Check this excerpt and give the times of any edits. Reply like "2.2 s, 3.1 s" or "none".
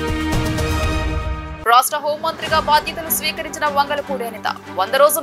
none